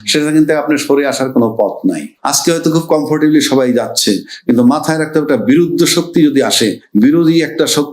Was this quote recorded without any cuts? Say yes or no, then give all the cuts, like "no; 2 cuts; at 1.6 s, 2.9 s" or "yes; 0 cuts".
no; 1 cut; at 2.1 s